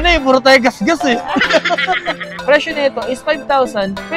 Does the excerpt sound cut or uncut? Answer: cut